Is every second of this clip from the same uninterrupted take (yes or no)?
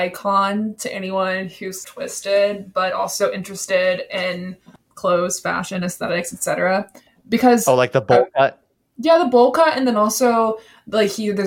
yes